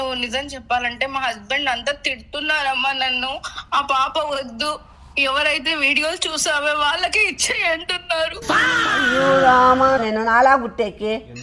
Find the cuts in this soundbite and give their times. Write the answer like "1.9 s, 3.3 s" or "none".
10.0 s

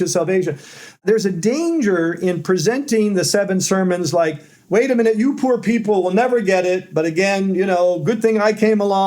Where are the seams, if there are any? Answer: 1.0 s

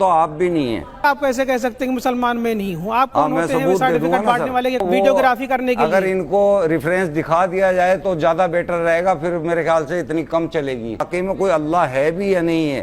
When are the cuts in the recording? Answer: 1.0 s, 4.8 s, 11.0 s

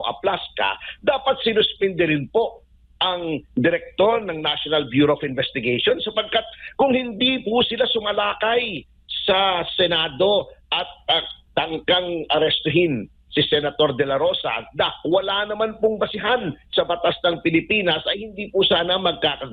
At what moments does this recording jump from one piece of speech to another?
none

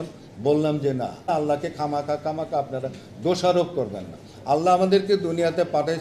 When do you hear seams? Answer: 1.3 s

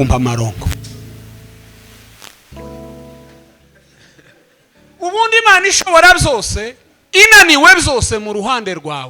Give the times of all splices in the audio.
3.4 s

